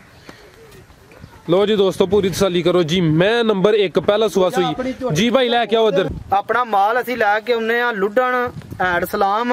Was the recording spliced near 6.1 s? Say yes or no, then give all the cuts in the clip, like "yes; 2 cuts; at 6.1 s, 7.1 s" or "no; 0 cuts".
yes; 1 cut; at 6.1 s